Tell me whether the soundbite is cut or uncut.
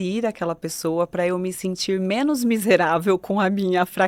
uncut